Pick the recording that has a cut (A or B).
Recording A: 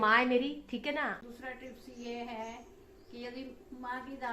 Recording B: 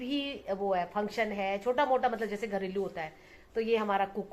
A